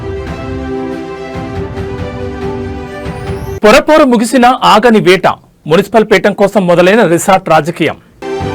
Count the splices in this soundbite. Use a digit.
1